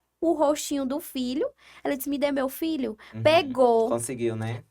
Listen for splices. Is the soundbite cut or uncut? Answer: uncut